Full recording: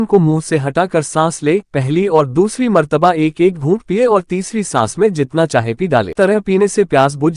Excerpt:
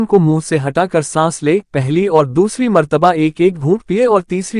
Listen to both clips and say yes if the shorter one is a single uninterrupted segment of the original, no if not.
yes